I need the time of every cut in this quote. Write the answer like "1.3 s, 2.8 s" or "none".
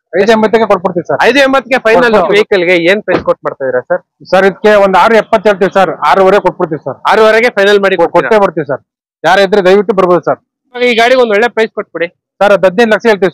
2.3 s, 10.8 s